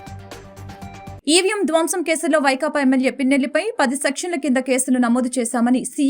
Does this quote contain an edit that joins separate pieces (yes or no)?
yes